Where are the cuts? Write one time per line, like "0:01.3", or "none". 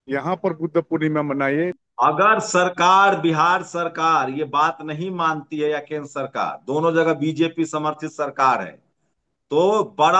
0:01.8

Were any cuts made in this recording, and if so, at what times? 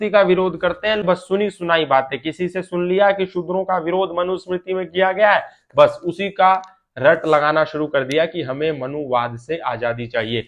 0:01.0

